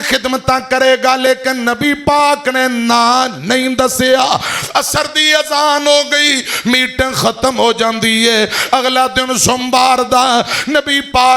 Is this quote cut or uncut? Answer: uncut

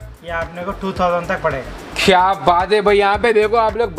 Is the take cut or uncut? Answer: uncut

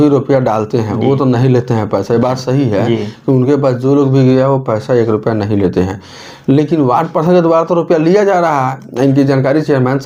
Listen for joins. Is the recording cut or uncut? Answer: uncut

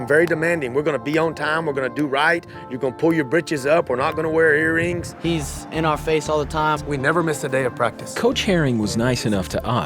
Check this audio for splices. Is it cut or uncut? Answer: cut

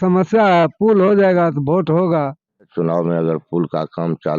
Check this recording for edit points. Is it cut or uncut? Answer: cut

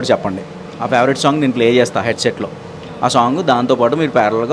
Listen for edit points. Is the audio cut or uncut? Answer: uncut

